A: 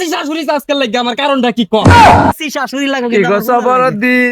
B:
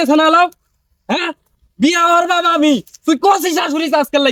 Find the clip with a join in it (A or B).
A